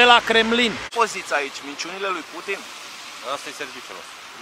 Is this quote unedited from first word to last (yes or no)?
no